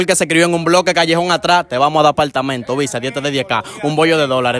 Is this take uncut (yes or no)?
yes